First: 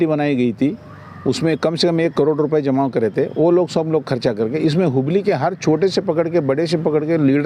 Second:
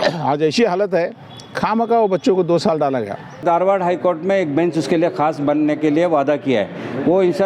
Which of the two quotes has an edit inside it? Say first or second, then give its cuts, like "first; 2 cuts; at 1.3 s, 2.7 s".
second; 1 cut; at 3.4 s